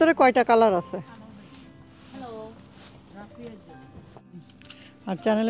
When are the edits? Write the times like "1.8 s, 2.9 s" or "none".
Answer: 4.6 s